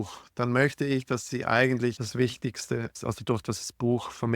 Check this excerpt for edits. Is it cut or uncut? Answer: cut